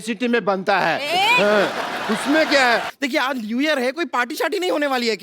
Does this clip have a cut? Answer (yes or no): yes